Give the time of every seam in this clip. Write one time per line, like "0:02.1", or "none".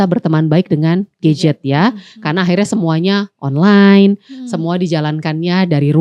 none